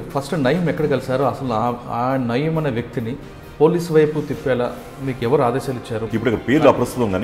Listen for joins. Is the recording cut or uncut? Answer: cut